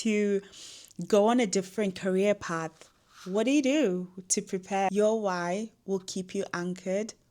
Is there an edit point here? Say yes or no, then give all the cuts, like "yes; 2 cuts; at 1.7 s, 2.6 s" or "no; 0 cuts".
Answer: yes; 1 cut; at 4.9 s